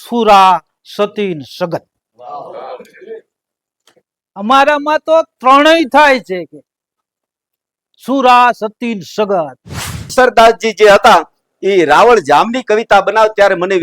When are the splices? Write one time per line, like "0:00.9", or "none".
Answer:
0:10.1